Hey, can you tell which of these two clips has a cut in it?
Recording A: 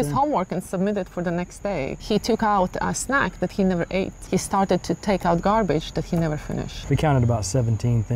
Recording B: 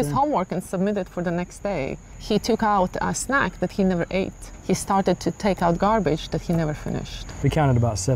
A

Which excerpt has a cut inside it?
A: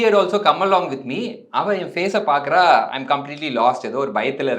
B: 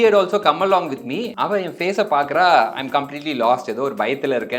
B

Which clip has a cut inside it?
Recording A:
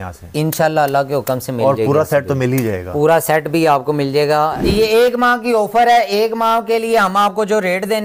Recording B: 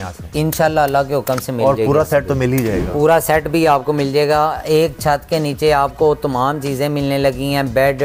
A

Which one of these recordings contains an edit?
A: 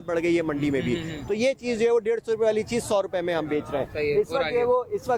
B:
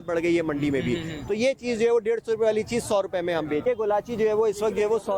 B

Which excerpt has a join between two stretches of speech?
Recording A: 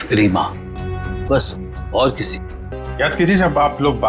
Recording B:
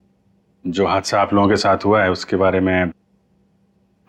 A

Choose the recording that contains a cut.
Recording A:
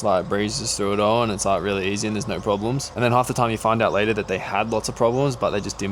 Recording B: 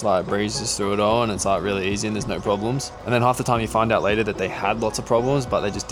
A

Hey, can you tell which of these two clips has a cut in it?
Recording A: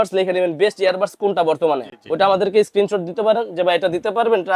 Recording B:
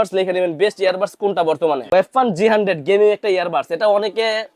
B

